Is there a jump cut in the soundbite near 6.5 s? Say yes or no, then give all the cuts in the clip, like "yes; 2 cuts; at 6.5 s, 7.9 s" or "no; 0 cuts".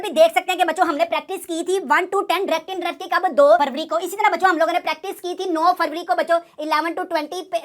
no; 0 cuts